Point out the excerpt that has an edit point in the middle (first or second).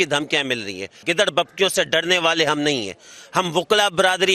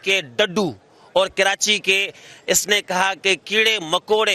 first